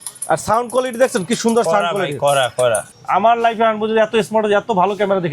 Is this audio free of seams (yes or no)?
no